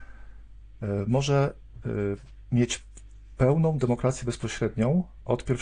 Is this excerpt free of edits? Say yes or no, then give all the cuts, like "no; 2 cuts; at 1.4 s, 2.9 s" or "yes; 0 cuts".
yes; 0 cuts